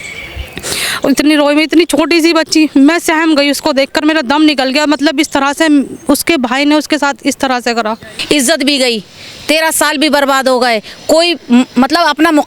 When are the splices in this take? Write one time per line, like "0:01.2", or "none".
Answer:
0:08.2